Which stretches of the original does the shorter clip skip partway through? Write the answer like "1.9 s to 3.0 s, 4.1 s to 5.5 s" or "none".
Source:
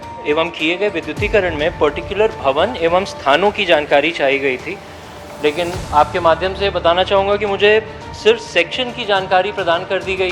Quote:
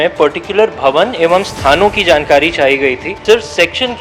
4.7 s to 8.1 s

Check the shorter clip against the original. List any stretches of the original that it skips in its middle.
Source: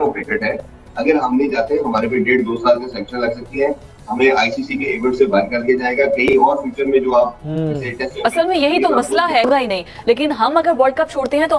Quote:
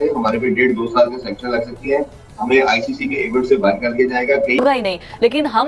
6.3 s to 9.4 s

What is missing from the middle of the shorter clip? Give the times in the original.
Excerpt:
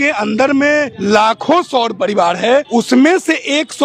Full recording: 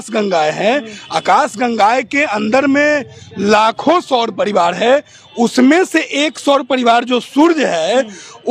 3.1 s to 3.3 s, 5.1 s to 5.3 s

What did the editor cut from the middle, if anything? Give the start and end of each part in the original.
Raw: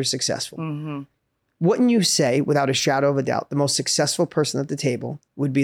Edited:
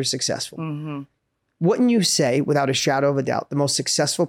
none

